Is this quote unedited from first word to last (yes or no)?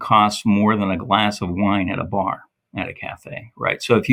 yes